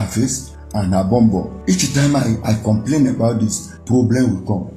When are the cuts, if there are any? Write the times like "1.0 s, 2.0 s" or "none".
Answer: 1.5 s, 3.7 s